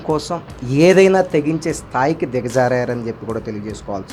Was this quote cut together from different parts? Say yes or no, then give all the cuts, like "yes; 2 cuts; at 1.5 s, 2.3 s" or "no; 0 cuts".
no; 0 cuts